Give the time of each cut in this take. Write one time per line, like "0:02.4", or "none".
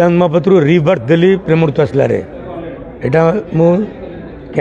none